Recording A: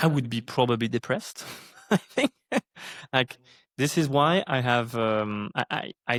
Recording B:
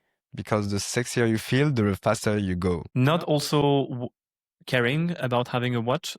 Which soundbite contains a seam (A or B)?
B